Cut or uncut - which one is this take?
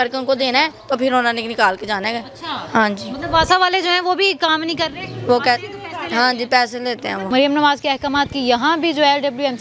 cut